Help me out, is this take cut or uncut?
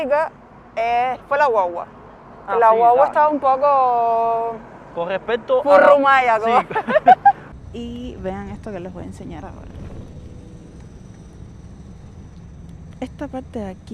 cut